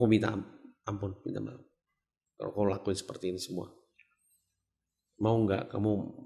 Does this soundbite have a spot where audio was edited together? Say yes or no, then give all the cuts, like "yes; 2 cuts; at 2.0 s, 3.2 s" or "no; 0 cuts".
no; 0 cuts